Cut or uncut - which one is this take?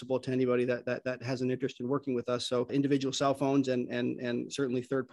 uncut